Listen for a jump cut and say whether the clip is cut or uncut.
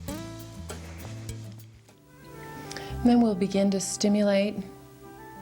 cut